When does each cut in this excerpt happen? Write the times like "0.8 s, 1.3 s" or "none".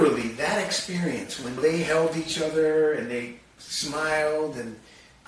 1.6 s